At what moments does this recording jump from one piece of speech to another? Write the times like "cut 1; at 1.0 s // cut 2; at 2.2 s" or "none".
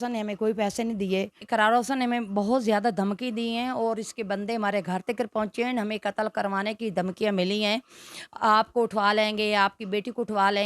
cut 1; at 1.4 s